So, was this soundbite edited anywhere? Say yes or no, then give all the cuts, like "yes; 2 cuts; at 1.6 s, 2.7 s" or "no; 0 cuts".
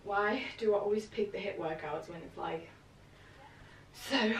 no; 0 cuts